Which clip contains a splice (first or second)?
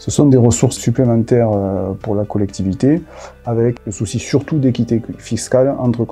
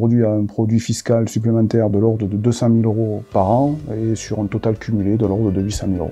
first